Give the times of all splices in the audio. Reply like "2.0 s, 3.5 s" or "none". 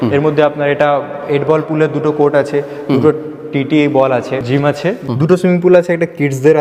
4.7 s